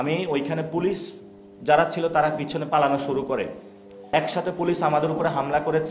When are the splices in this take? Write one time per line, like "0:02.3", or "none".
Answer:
0:04.0